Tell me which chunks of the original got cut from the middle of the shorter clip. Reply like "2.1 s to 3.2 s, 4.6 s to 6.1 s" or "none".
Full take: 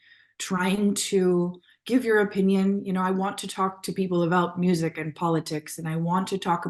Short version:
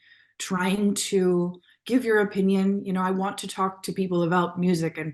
none